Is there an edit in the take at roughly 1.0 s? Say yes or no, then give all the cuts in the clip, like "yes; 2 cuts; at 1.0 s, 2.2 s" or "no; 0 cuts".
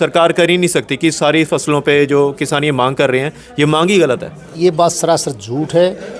no; 1 cut; at 4.6 s